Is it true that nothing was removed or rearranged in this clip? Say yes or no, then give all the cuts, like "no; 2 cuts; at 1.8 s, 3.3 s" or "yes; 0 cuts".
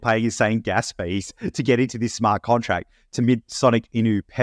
no; 1 cut; at 3.2 s